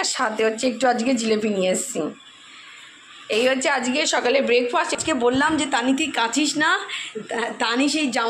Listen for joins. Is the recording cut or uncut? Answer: cut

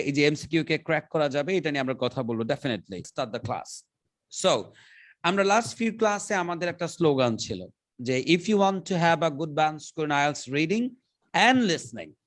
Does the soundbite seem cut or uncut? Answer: cut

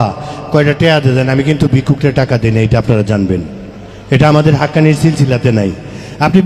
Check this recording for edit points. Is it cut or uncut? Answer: uncut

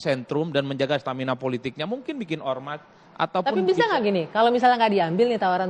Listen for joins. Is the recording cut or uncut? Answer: uncut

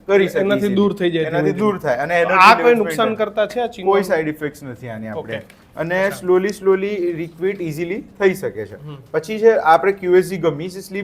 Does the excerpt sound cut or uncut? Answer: uncut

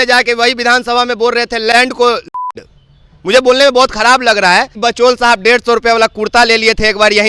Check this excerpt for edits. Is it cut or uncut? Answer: cut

